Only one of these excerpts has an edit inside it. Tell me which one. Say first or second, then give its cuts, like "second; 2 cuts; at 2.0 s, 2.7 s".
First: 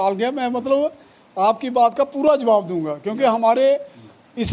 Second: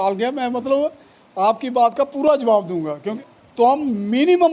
second; 1 cut; at 3.1 s